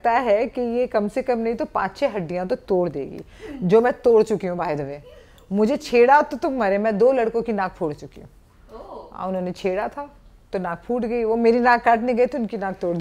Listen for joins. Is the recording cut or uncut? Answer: uncut